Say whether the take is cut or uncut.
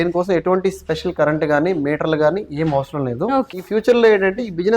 cut